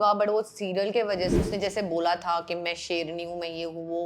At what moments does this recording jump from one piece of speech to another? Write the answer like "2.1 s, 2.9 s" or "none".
1.3 s